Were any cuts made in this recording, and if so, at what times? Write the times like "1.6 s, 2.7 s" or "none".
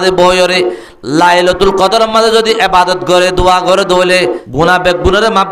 4.4 s